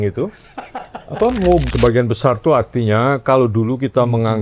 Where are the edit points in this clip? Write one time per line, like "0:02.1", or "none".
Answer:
0:01.6